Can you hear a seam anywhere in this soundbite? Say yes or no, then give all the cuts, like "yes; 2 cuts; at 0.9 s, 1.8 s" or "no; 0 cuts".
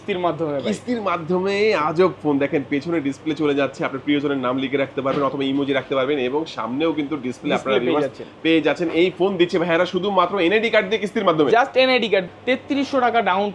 yes; 1 cut; at 12.3 s